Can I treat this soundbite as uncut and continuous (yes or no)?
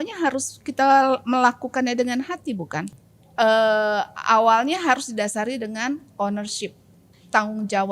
no